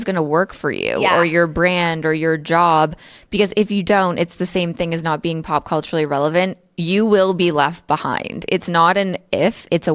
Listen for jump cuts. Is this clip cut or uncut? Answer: uncut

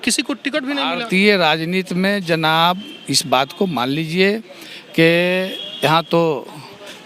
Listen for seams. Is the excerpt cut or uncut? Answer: uncut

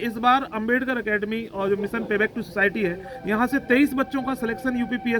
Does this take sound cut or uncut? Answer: uncut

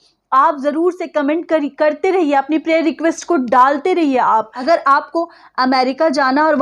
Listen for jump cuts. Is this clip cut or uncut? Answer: cut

